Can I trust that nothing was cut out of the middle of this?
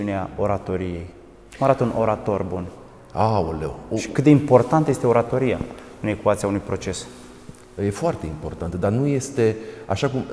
yes; 0 cuts

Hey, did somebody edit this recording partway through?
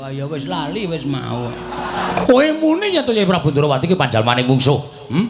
yes; 1 cut; at 2.1 s

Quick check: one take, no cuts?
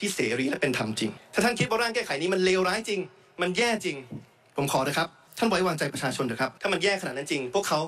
no; 3 cuts; at 1.2 s, 5.2 s, 6.6 s

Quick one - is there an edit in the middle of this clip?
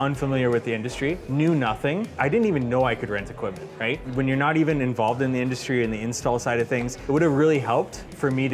yes; 4 cuts; at 1.2 s, 2.2 s, 4.0 s, 6.9 s

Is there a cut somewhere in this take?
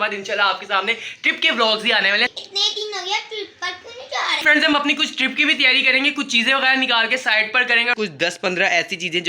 yes; 3 cuts; at 2.3 s, 4.4 s, 7.9 s

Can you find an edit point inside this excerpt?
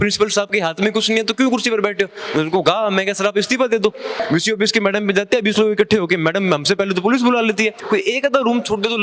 yes; 2 cuts; at 4.1 s, 7.8 s

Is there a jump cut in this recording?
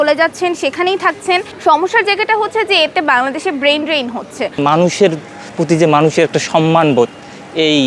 yes; 2 cuts; at 1.5 s, 4.5 s

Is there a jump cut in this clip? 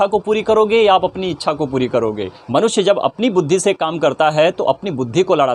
yes; 1 cut; at 2.3 s

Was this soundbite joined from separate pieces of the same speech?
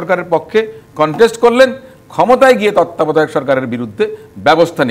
no; 0 cuts

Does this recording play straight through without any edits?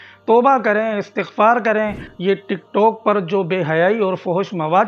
no; 1 cut; at 2.1 s

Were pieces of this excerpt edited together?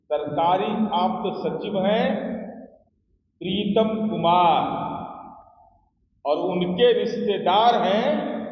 no; 0 cuts

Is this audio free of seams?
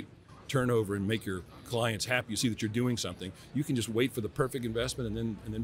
yes; 0 cuts

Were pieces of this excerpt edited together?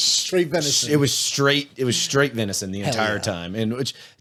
no; 0 cuts

